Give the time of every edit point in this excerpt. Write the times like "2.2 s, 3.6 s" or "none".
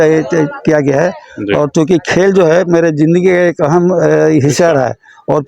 none